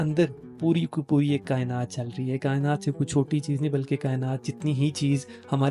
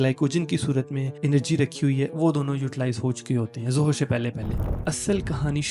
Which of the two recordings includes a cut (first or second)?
second